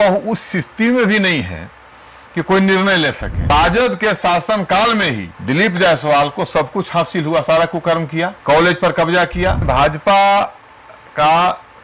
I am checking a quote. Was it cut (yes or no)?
yes